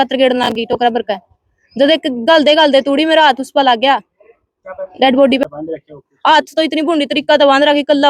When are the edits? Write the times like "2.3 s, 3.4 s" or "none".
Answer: 5.5 s